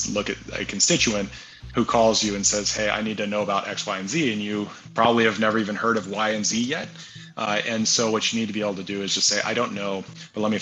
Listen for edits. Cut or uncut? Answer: uncut